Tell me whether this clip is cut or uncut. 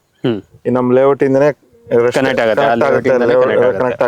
uncut